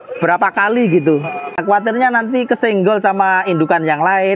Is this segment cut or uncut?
cut